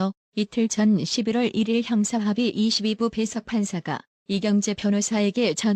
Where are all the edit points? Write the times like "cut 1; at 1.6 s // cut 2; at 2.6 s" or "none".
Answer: cut 1; at 1.3 s